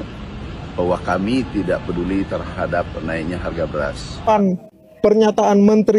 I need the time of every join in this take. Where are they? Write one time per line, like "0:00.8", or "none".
0:04.2